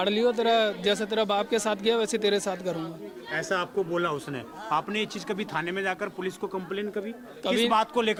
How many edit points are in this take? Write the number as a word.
zero